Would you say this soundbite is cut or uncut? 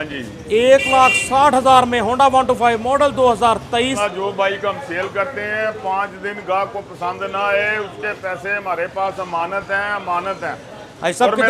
cut